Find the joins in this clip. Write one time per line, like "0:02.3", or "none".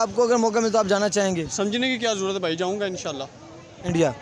none